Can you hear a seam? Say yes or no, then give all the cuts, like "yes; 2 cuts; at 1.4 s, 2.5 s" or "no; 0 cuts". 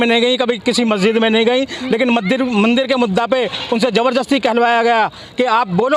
no; 0 cuts